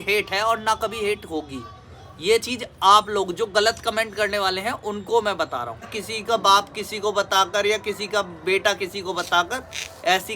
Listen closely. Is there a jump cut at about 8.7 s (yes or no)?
no